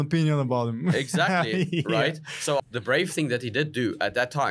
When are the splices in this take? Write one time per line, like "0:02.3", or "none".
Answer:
0:02.6